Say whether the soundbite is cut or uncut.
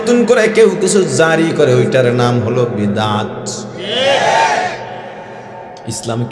uncut